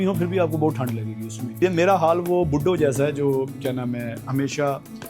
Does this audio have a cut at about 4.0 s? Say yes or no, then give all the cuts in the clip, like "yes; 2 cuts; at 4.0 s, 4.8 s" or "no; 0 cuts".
no; 1 cut; at 1.6 s